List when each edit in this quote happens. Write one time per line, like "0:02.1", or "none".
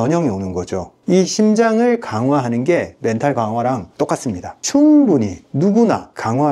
0:01.0
0:04.6